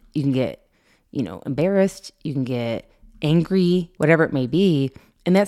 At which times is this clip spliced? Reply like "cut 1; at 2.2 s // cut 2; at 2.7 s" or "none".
cut 1; at 3.9 s